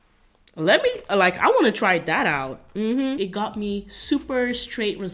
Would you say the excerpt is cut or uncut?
cut